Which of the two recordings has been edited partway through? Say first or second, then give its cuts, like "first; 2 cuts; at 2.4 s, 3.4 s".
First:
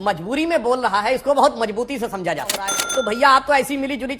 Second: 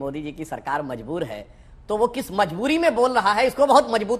first; 1 cut; at 2.8 s